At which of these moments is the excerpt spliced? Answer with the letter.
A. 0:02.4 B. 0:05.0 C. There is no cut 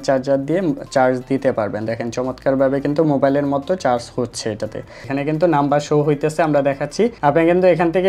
B